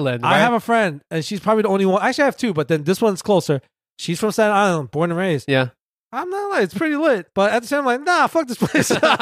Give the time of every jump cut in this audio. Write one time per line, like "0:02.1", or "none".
none